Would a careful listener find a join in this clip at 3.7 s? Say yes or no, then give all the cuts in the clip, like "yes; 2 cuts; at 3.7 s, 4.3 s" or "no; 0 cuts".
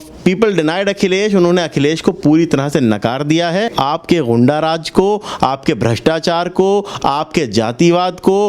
yes; 1 cut; at 3.7 s